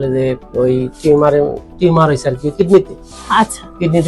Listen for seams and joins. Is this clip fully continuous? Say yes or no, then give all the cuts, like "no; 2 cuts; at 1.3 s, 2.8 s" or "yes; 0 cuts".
yes; 0 cuts